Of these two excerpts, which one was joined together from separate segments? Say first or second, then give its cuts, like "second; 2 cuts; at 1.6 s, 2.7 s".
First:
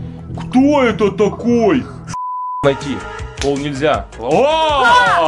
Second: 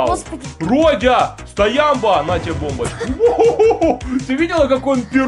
first; 1 cut; at 2.2 s